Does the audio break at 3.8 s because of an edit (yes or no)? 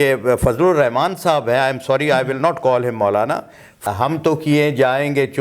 yes